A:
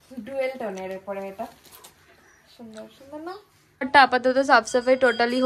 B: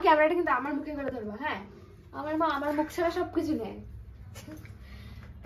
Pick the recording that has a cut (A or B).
A